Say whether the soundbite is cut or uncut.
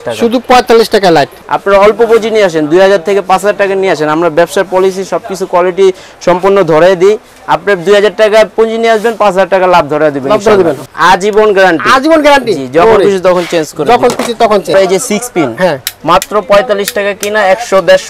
cut